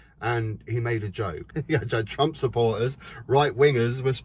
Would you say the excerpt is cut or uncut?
cut